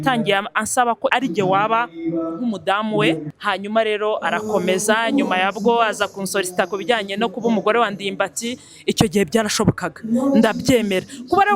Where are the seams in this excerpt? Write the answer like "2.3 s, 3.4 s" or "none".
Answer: 1.1 s, 3.2 s

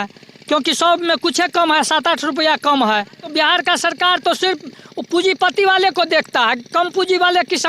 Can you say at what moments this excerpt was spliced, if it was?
3.3 s

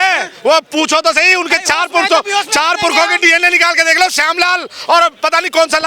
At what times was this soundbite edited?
none

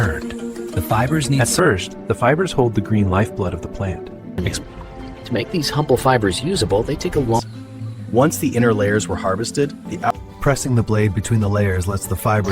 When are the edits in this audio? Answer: 1.5 s, 4.5 s, 7.4 s, 10.1 s

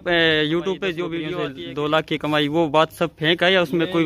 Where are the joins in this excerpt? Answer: 1.3 s

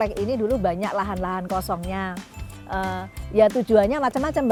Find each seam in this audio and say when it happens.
none

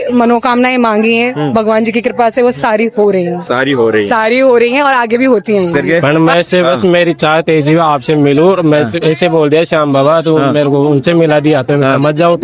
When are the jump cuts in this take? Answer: 5.7 s

